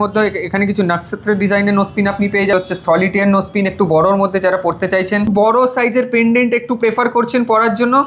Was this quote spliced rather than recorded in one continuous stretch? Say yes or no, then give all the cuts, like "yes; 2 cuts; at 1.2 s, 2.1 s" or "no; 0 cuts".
yes; 2 cuts; at 2.5 s, 5.3 s